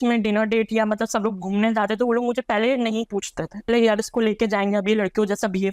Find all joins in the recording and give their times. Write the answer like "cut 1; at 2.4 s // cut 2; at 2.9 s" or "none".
cut 1; at 3.7 s